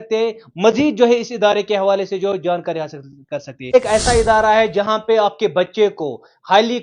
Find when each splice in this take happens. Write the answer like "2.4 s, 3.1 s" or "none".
3.5 s